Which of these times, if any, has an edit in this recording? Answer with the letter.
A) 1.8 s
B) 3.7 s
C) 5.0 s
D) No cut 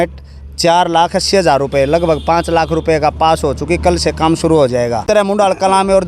C